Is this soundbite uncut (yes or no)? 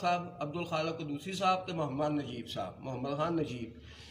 yes